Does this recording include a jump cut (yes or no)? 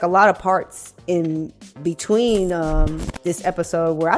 no